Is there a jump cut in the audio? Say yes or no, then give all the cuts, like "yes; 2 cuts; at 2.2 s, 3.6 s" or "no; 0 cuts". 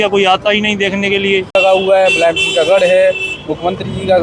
yes; 1 cut; at 1.5 s